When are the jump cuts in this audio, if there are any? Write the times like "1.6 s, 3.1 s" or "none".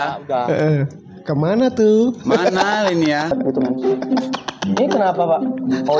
3.3 s